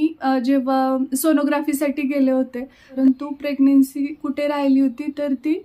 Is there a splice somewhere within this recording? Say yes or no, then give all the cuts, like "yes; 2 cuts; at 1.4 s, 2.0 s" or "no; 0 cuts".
yes; 1 cut; at 3.0 s